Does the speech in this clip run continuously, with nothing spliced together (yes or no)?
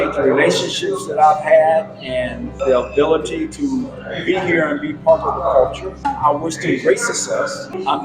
yes